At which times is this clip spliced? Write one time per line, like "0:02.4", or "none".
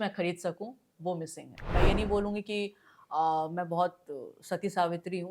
0:01.6